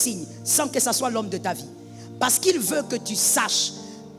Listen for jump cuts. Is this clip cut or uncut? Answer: uncut